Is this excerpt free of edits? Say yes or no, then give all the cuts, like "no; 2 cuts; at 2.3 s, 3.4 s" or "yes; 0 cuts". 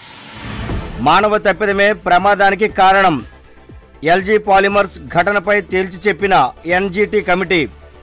no; 1 cut; at 0.9 s